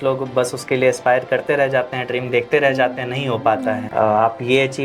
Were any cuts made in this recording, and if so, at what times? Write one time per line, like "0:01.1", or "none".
0:03.8